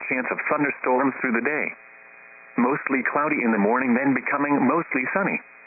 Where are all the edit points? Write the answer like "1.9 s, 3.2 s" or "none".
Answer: 1.0 s